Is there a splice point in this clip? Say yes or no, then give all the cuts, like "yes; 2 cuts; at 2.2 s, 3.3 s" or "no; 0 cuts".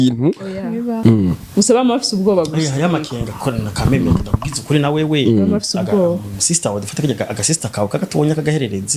yes; 1 cut; at 1.0 s